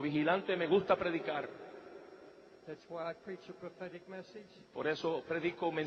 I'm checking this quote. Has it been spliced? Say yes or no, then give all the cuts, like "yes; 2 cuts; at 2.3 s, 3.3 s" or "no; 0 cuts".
yes; 1 cut; at 1.6 s